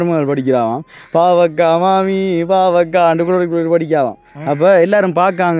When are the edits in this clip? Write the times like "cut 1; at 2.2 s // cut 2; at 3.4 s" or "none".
none